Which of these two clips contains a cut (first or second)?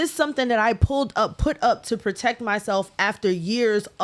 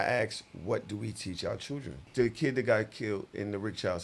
second